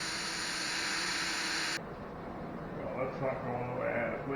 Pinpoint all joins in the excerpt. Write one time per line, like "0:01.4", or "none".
0:01.8

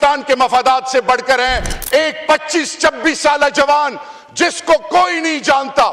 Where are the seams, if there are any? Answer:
0:01.7

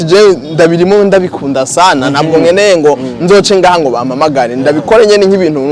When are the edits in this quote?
none

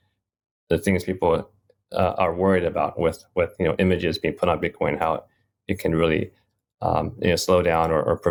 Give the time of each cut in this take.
none

